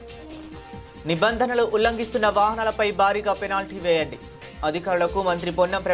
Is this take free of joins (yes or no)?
no